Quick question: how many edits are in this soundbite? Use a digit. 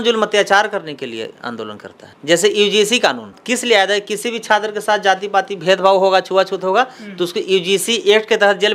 0